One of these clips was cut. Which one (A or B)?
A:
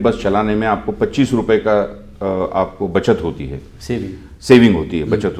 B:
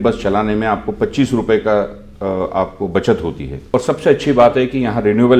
B